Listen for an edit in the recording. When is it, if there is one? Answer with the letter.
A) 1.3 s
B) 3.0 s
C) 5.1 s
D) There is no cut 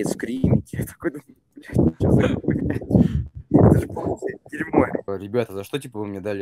C